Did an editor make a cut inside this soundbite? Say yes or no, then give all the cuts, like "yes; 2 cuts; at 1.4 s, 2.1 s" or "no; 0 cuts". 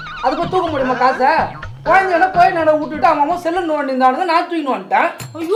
no; 0 cuts